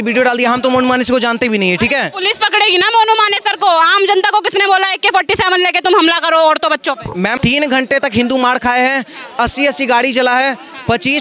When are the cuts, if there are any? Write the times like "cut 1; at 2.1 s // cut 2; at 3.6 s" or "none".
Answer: cut 1; at 7.3 s